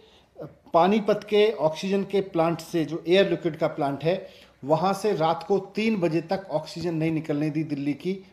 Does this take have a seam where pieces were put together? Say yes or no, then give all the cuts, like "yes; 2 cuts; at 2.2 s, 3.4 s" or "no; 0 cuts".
no; 0 cuts